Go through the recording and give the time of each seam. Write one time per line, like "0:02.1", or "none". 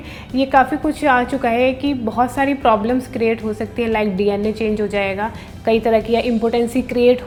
none